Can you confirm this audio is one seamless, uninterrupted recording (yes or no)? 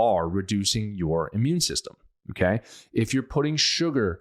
yes